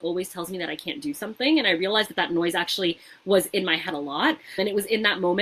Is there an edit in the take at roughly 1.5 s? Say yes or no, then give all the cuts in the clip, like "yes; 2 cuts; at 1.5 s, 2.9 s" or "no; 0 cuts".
no; 0 cuts